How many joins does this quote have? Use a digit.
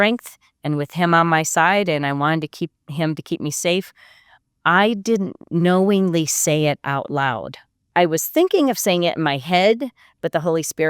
1